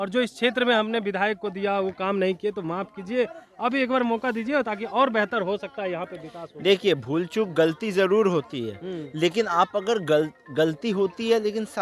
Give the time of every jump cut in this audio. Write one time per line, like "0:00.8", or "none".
none